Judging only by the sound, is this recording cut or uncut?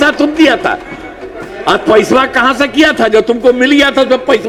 uncut